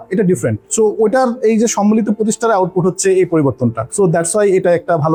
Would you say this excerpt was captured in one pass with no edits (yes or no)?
yes